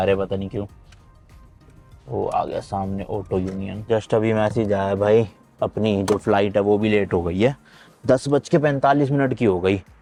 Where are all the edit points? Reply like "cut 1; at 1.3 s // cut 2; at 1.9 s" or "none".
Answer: none